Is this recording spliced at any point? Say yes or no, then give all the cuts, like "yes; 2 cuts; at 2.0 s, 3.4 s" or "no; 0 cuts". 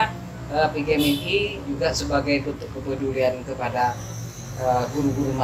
no; 0 cuts